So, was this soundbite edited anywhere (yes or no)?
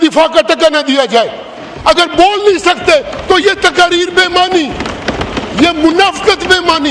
no